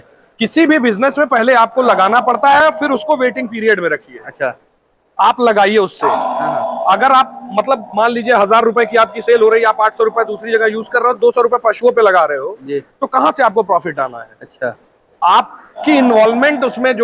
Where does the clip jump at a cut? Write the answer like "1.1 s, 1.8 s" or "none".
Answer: none